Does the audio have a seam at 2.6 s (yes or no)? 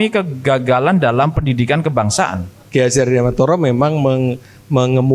yes